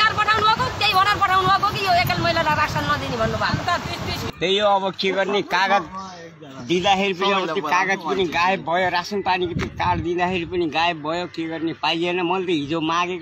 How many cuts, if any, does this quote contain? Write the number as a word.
one